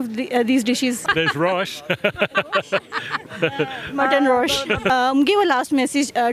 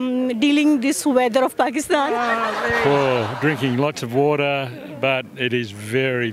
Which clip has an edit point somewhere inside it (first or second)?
first